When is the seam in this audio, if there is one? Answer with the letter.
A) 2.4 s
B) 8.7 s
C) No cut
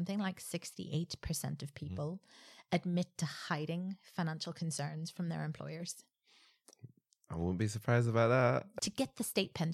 B